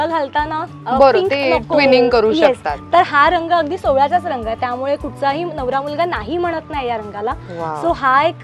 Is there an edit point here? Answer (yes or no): no